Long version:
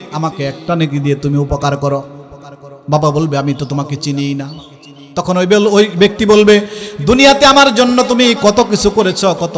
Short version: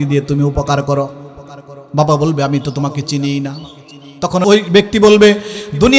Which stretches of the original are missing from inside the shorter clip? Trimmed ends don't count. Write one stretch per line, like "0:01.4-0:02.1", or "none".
0:05.4-0:05.7